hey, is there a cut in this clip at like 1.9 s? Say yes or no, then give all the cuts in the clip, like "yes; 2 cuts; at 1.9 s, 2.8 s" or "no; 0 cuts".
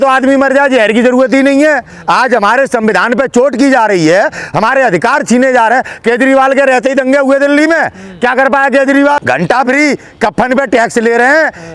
yes; 2 cuts; at 1.9 s, 9.2 s